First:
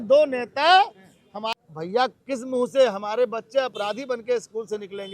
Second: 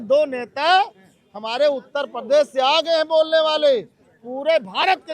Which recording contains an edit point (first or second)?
first